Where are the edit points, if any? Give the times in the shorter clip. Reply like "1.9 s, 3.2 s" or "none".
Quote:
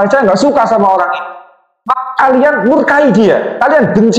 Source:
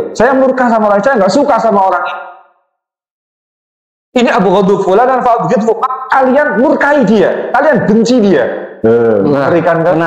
1.9 s

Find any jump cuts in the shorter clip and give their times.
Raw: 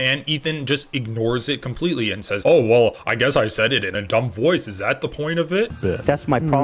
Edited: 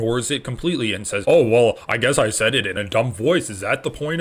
none

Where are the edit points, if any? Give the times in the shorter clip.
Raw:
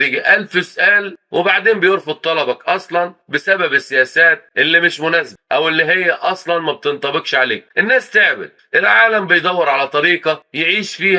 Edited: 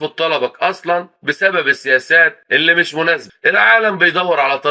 3.3 s

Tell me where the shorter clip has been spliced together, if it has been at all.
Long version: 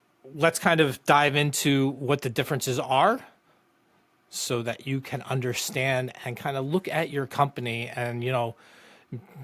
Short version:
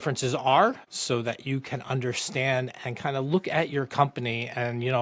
0.9 s

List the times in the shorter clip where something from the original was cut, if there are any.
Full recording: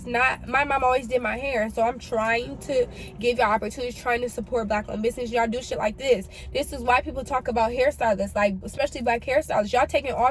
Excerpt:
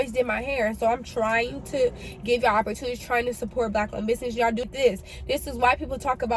4.7 s

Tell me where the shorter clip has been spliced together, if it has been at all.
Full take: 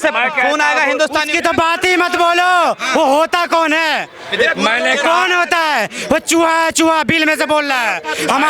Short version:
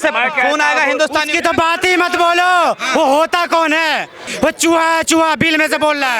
4.2 s

